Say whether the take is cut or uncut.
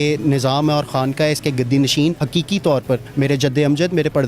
cut